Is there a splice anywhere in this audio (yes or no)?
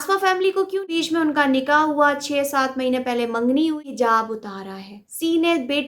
yes